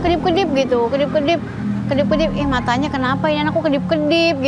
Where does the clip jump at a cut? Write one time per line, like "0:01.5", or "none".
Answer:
none

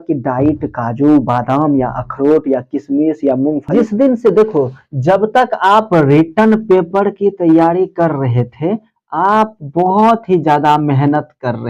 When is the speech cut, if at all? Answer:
0:03.6

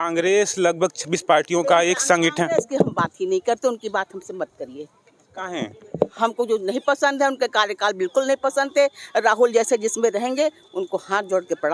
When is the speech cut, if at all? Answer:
none

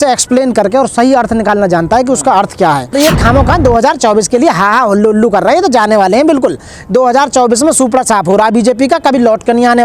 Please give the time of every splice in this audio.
0:02.9

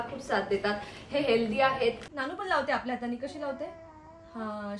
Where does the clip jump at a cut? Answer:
0:02.0

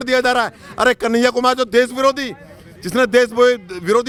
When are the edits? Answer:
none

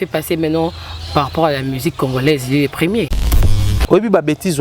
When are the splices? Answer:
0:03.5

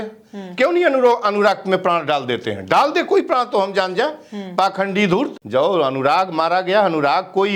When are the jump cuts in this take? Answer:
0:05.4

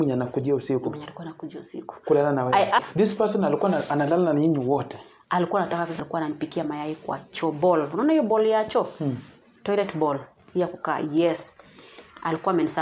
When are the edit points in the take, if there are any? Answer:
0:02.9
0:06.0

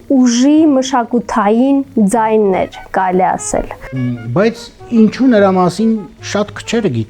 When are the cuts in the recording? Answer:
0:03.8

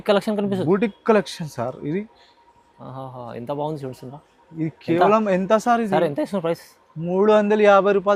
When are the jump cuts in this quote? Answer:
none

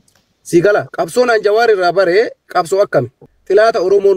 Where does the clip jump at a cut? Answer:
0:03.2

